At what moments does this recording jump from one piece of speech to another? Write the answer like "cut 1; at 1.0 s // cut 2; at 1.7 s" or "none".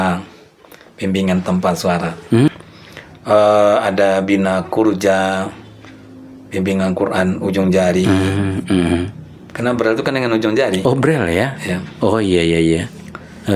cut 1; at 2.5 s